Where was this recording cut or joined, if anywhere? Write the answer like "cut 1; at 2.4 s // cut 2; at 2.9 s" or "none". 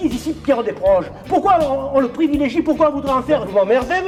none